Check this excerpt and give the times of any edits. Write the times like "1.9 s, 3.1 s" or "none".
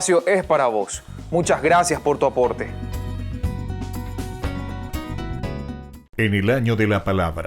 6.0 s